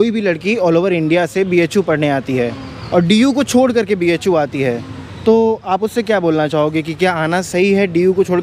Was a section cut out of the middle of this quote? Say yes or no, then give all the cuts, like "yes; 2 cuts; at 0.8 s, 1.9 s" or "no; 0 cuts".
no; 0 cuts